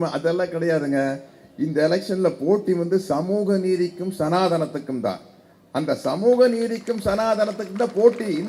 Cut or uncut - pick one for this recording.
uncut